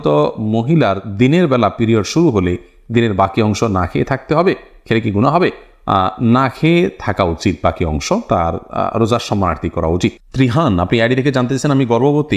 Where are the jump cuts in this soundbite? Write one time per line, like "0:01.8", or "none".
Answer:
none